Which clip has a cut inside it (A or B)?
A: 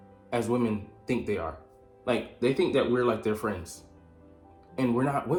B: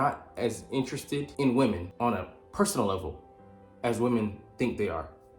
B